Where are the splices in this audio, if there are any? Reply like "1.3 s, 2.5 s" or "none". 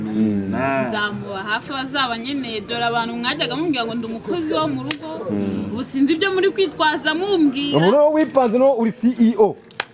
none